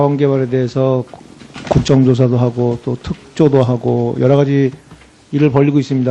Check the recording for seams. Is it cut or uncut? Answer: uncut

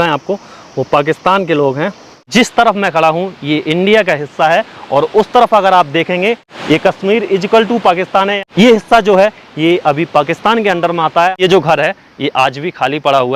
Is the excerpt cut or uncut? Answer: cut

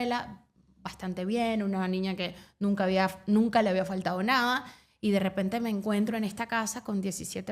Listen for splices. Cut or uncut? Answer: uncut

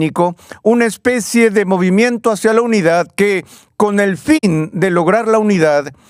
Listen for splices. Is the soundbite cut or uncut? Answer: uncut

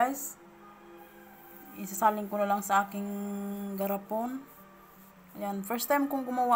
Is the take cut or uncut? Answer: uncut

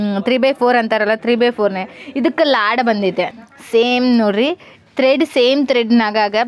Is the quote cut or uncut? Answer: cut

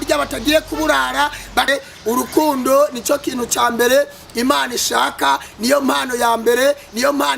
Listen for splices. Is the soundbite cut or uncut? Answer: cut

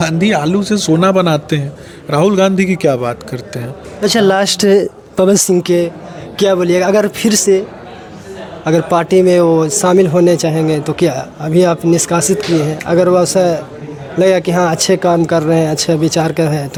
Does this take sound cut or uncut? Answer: uncut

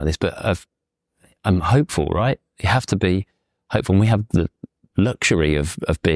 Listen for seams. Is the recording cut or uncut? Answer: uncut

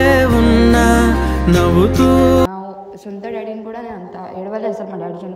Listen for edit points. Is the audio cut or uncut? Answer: cut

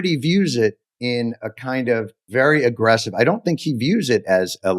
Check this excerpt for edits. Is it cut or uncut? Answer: cut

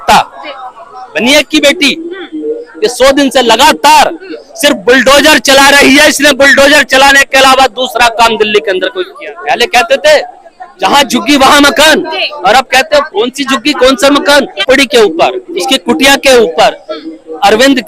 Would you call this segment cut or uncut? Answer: cut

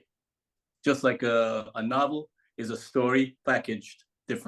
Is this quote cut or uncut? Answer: uncut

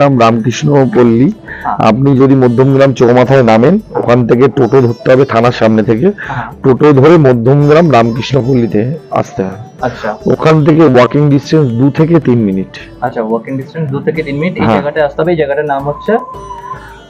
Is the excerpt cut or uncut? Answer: uncut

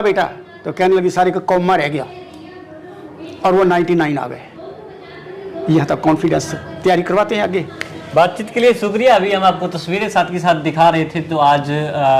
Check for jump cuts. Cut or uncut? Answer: uncut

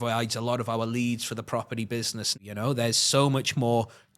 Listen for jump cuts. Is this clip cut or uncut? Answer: cut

